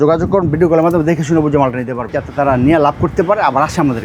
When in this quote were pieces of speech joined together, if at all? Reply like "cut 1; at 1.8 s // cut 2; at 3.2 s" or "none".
cut 1; at 2.2 s